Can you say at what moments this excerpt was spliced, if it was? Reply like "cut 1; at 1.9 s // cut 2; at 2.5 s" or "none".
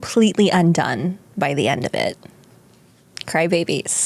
none

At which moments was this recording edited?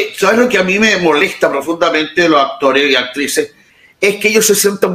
cut 1; at 3.7 s

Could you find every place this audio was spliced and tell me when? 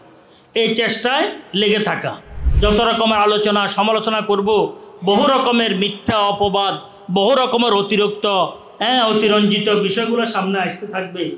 cut 1; at 2.4 s

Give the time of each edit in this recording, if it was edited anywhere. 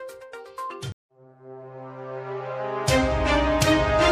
none

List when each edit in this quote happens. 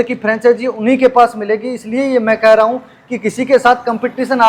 none

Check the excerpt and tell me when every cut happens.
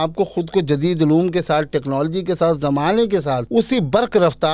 cut 1; at 3.4 s

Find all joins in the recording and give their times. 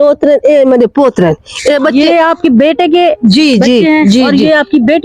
none

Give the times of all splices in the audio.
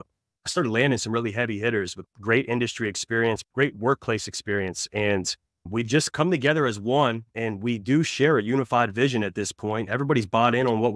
cut 1; at 3.4 s

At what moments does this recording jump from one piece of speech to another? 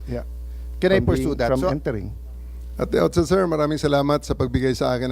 cut 1; at 1.5 s

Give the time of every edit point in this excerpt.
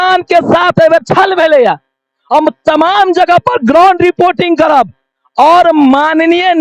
none

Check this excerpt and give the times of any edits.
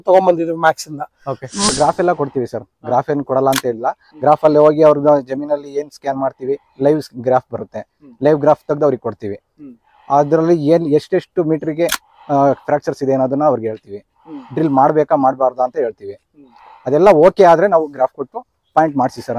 cut 1; at 1.7 s

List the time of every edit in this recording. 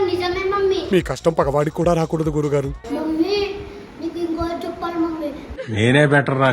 cut 1; at 2.8 s

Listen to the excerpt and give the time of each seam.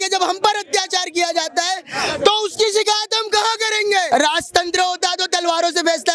cut 1; at 4.1 s

